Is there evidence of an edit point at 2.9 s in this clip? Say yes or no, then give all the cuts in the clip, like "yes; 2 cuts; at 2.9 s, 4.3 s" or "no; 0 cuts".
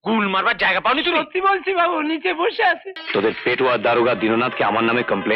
yes; 1 cut; at 2.9 s